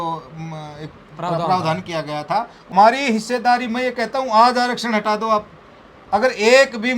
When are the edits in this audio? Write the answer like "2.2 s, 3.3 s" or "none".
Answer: 2.7 s